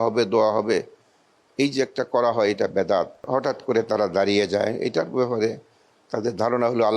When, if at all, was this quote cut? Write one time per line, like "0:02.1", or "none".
0:03.2